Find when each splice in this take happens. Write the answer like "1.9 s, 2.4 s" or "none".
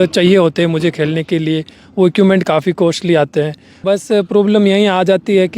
3.7 s